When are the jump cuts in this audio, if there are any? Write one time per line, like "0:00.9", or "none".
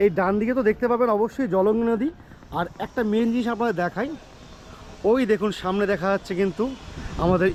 none